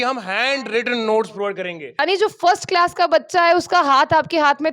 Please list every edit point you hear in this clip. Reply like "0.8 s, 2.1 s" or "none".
2.0 s